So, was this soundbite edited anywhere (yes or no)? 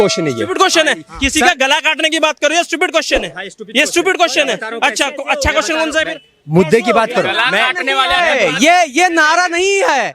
no